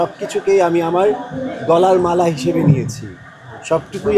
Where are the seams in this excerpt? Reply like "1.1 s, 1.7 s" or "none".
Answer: none